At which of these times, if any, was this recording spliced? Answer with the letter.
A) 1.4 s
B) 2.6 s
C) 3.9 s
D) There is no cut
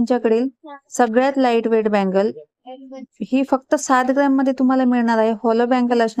D